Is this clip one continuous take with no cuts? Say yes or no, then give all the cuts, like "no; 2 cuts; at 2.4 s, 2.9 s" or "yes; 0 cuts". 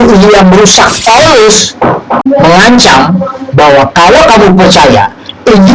no; 2 cuts; at 1.0 s, 2.2 s